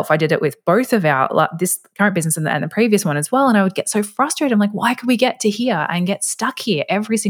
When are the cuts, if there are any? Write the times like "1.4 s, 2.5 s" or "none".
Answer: none